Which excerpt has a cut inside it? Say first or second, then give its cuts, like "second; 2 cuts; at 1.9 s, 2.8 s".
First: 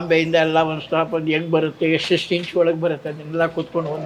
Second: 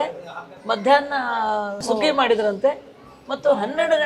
second; 1 cut; at 1.8 s